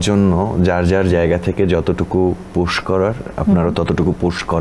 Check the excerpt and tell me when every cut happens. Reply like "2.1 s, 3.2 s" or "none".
none